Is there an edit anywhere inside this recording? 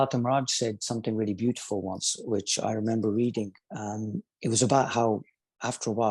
no; 0 cuts

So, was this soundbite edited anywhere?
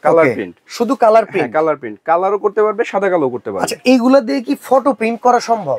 no; 0 cuts

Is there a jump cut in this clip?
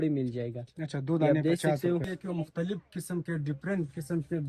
yes; 1 cut; at 2.1 s

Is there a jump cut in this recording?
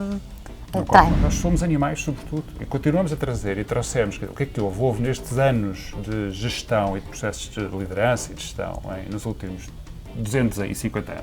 yes; 1 cut; at 1.3 s

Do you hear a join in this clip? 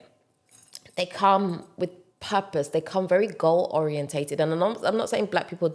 no; 0 cuts

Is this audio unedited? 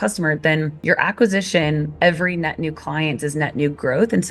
yes; 0 cuts

